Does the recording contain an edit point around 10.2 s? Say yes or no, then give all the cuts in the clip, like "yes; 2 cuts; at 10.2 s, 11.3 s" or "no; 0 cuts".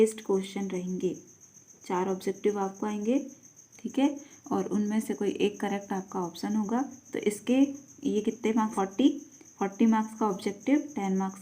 no; 1 cut; at 8.7 s